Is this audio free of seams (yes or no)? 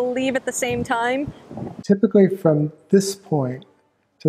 no